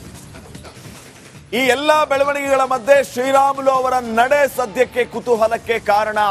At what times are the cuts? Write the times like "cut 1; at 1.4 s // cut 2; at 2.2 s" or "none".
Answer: cut 1; at 1.0 s